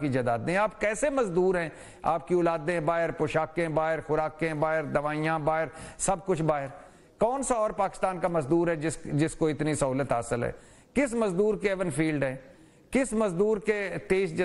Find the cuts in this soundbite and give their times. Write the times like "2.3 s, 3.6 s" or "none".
none